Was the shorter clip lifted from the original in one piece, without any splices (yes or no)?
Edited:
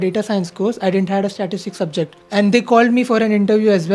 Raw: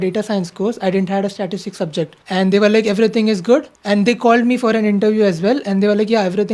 no